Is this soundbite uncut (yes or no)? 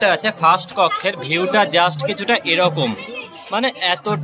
yes